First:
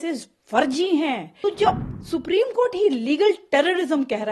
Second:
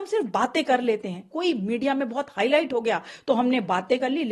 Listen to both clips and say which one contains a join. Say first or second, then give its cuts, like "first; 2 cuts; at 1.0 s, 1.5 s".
first; 1 cut; at 1.3 s